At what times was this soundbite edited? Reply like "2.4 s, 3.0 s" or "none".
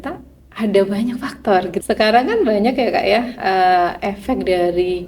1.7 s